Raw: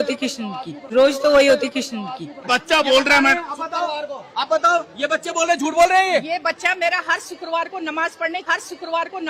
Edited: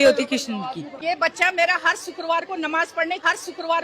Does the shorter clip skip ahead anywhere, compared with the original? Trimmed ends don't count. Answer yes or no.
yes